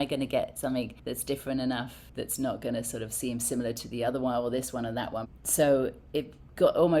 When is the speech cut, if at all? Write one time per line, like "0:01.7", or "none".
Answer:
0:01.0
0:02.0
0:05.3
0:06.0